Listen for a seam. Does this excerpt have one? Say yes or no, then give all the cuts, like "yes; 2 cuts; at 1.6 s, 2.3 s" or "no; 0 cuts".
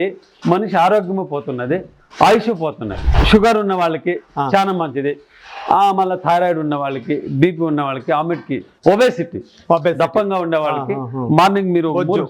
yes; 2 cuts; at 3.1 s, 8.7 s